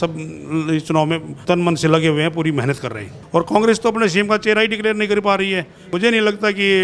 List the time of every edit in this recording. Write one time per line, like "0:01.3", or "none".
0:01.3
0:03.1
0:05.9

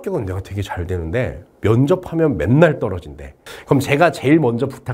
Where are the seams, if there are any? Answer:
0:03.5

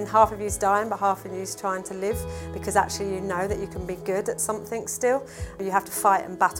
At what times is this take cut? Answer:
0:05.6

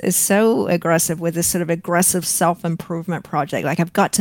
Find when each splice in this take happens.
none

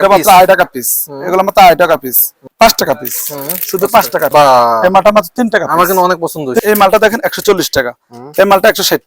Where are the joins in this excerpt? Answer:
0:02.4
0:04.3
0:06.6

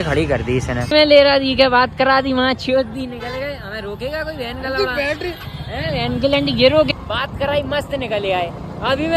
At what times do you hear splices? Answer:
0:00.8
0:06.9

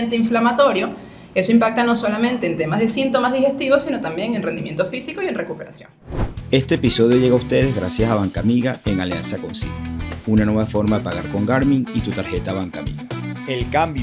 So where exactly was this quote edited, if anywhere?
0:06.0

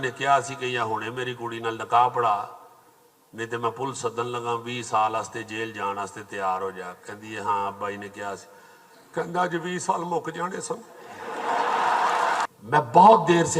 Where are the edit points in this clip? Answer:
0:12.5

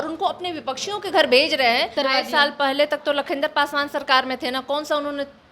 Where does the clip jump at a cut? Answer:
0:01.9

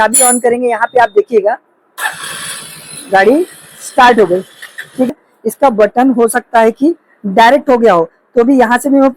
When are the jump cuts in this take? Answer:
0:05.1

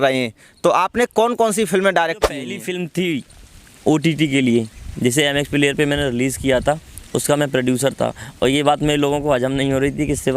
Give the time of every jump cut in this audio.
0:02.5

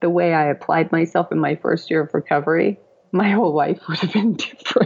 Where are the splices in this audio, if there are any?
0:02.9

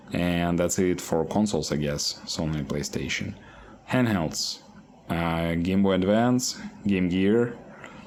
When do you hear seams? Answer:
none

